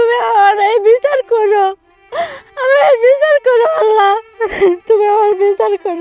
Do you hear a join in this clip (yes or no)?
no